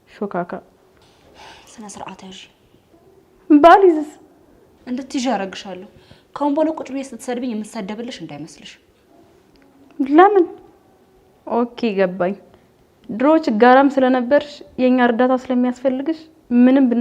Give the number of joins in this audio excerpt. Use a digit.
0